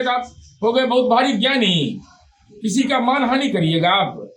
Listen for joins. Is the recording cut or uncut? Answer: uncut